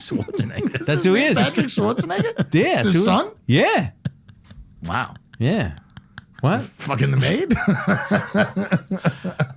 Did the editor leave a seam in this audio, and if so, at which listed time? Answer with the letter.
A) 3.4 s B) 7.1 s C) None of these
C